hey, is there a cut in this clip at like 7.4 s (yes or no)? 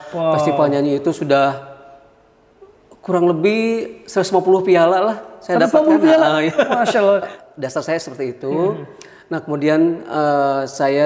yes